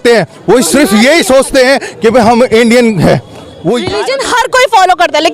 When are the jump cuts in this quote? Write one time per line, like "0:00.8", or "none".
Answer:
0:04.0